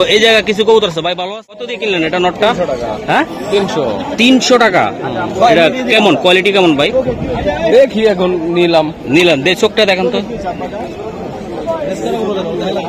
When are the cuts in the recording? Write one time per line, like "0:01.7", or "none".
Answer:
0:01.2